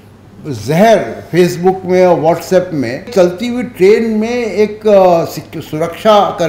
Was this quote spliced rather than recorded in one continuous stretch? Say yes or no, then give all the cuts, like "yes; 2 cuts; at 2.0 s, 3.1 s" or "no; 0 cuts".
yes; 1 cut; at 3.1 s